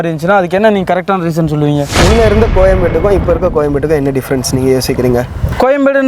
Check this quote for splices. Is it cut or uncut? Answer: cut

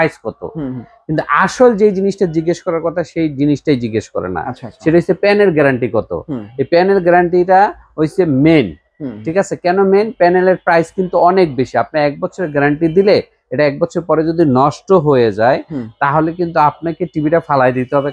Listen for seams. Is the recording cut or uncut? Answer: uncut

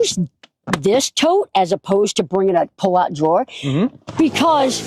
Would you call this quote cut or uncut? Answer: uncut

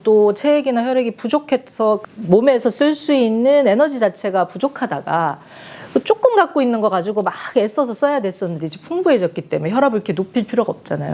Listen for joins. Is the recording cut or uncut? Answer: uncut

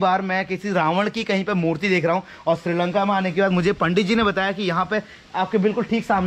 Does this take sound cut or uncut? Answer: uncut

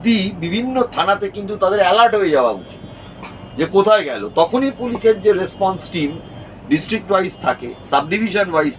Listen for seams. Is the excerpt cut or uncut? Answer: uncut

